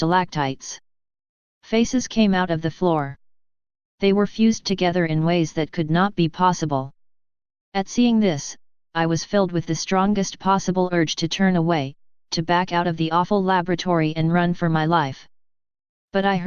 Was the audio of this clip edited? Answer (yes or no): no